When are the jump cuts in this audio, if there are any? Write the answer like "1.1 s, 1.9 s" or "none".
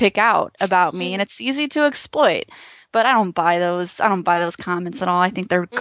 none